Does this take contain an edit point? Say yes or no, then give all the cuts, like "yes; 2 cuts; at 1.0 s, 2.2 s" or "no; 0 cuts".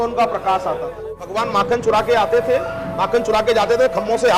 yes; 1 cut; at 1.3 s